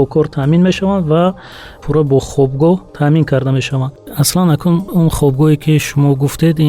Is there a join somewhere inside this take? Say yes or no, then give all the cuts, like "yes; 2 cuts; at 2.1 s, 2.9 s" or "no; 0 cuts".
yes; 3 cuts; at 1.8 s, 4.1 s, 4.9 s